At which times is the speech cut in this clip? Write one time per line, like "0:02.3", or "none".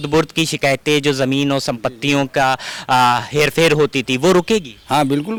none